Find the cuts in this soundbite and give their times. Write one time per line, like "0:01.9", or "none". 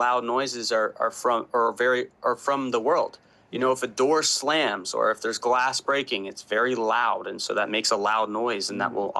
none